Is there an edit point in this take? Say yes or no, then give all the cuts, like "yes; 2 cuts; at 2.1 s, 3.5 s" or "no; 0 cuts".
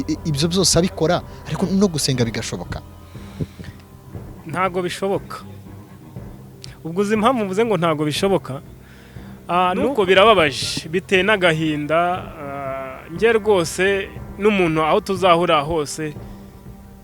yes; 1 cut; at 9.9 s